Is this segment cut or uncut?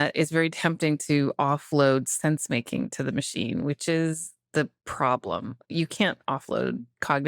uncut